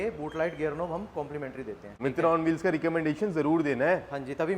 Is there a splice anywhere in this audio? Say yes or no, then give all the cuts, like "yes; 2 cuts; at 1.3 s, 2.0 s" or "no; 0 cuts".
no; 0 cuts